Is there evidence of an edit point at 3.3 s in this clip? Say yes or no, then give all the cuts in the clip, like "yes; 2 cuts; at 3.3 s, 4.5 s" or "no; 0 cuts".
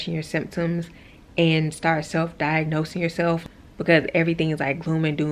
yes; 1 cut; at 3.3 s